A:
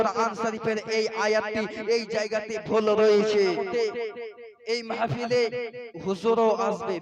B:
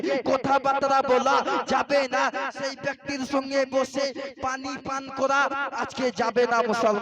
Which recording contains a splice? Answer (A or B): A